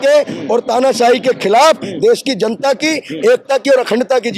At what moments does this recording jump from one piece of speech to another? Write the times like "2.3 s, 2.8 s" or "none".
none